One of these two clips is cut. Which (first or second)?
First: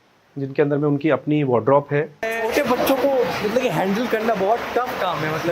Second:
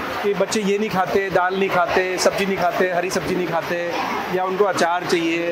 first